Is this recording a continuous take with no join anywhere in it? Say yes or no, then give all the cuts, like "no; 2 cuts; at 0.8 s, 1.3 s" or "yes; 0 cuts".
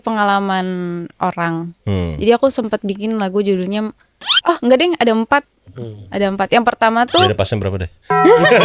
yes; 0 cuts